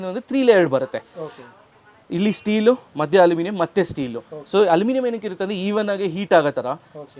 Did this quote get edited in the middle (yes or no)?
no